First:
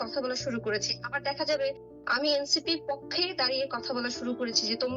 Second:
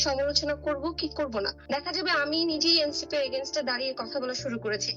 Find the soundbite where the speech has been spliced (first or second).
second